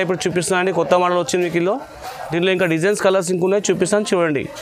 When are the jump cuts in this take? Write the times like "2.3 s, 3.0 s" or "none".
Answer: none